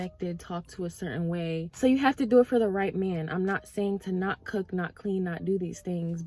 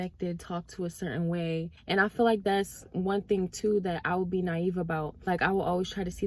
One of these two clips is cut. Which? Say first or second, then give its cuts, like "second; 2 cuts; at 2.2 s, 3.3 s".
second; 2 cuts; at 1.7 s, 5.2 s